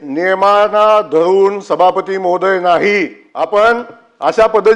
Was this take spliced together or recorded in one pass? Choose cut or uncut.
cut